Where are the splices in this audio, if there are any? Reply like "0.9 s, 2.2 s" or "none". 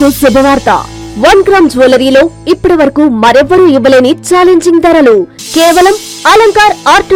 none